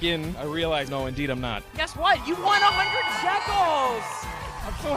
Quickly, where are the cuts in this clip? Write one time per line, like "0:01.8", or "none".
none